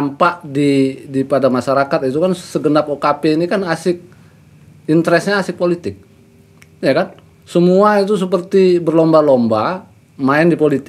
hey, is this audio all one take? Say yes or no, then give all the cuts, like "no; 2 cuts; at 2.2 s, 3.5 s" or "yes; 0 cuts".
yes; 0 cuts